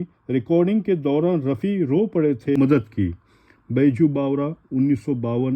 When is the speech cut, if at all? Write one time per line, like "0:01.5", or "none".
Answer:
0:02.6